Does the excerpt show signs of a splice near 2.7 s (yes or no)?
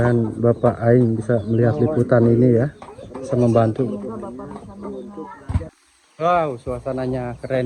no